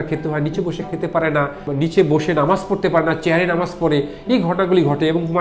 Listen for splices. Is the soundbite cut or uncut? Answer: cut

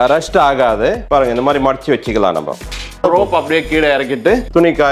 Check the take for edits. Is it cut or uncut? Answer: cut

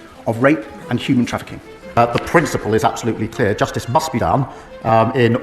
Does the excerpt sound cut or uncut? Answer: cut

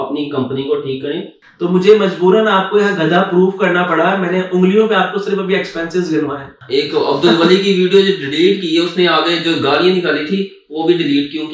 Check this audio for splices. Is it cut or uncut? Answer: cut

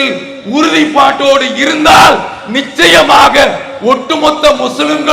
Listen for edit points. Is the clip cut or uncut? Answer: uncut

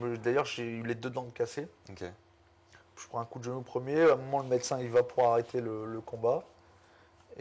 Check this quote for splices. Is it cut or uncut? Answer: uncut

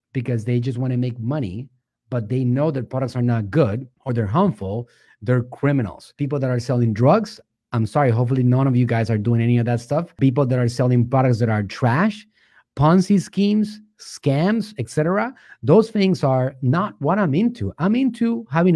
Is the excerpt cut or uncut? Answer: cut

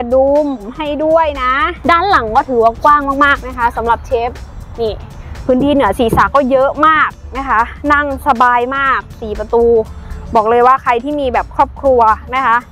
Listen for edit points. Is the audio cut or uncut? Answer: cut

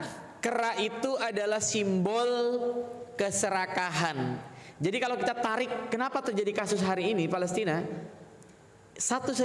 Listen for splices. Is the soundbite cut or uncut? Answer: uncut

